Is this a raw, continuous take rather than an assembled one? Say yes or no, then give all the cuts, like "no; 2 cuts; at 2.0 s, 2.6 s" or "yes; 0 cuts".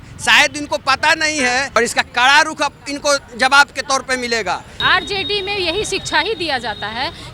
no; 2 cuts; at 1.8 s, 4.8 s